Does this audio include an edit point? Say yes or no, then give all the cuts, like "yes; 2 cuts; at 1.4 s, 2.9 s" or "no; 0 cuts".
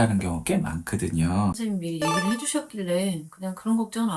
yes; 1 cut; at 1.6 s